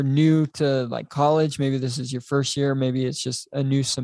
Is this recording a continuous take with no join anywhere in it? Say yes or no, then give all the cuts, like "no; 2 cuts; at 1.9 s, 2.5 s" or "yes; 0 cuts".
yes; 0 cuts